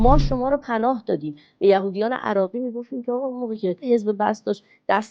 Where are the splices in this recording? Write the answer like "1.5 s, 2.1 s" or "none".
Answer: 3.8 s